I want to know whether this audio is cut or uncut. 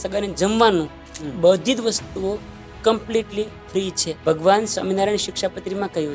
cut